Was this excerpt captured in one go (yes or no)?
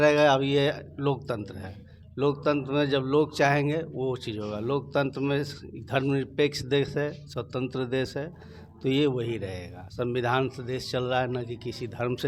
yes